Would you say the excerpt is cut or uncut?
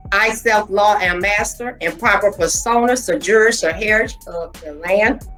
uncut